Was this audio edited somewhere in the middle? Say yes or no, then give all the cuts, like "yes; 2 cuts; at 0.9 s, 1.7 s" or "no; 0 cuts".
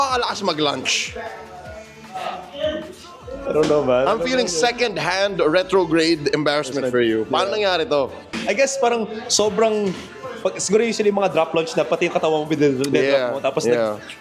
yes; 1 cut; at 8.3 s